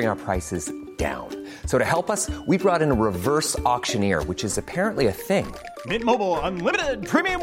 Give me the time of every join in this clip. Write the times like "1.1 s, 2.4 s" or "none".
none